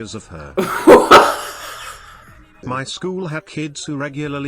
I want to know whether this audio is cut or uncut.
cut